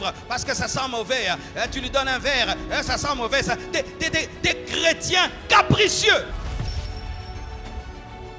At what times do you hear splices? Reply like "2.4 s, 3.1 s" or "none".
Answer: none